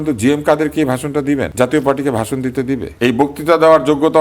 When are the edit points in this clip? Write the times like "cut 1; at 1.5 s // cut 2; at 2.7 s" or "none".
cut 1; at 1.5 s // cut 2; at 2.9 s